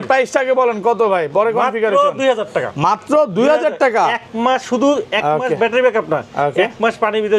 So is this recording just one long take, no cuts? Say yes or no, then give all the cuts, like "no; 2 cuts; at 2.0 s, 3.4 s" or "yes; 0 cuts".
yes; 0 cuts